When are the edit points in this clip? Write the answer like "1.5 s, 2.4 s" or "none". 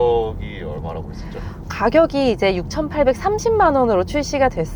none